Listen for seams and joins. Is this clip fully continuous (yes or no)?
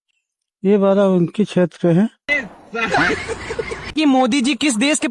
yes